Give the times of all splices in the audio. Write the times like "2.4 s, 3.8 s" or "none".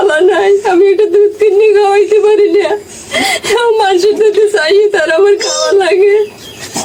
none